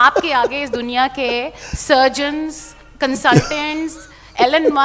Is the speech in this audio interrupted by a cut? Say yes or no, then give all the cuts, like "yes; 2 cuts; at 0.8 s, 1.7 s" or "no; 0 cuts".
no; 0 cuts